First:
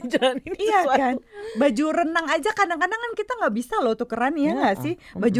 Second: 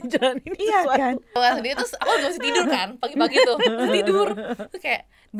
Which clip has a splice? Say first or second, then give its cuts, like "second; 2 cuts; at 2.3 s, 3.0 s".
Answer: second; 1 cut; at 1.4 s